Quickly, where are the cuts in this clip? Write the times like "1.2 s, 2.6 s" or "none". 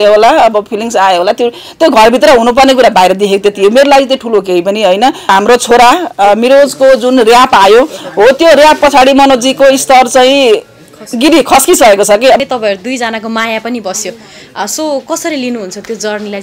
5.3 s, 12.4 s